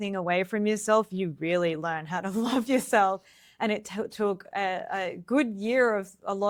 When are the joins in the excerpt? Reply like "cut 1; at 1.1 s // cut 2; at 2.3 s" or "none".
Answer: none